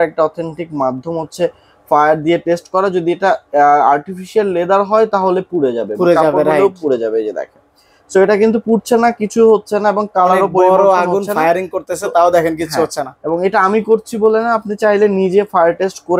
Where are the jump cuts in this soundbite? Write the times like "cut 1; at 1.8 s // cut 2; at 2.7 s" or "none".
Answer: none